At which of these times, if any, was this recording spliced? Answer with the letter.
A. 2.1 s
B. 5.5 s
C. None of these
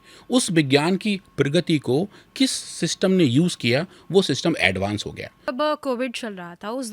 B